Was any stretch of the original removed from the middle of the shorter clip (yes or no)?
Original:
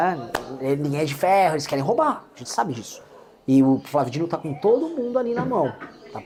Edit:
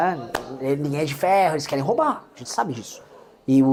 no